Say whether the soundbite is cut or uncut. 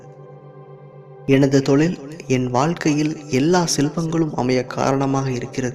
uncut